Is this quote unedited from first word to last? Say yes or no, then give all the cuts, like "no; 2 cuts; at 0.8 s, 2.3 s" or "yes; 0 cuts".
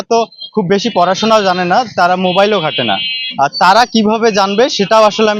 yes; 0 cuts